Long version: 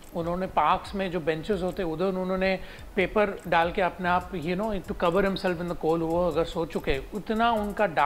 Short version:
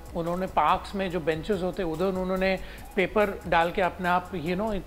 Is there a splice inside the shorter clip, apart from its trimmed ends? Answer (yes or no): no